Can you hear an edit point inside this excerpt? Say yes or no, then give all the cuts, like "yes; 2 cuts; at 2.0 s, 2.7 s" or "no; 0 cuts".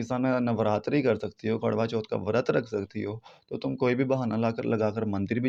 no; 0 cuts